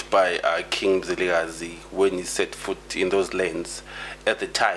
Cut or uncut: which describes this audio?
uncut